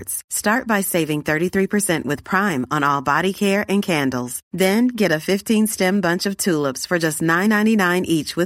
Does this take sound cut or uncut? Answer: uncut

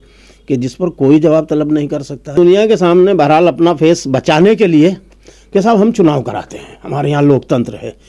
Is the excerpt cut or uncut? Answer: cut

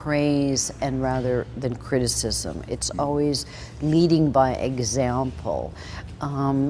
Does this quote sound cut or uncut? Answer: uncut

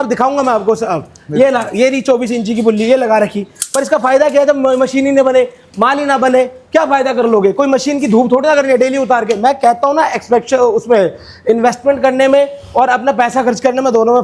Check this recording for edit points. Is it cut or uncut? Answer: uncut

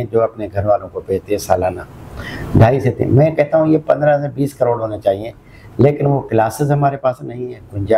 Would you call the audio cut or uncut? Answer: uncut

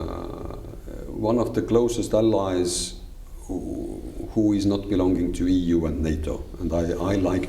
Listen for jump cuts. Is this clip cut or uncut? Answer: uncut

